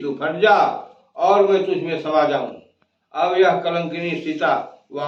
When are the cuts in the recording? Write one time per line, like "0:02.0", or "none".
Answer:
none